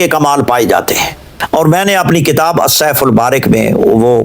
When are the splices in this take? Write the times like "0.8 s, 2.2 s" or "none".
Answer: 1.3 s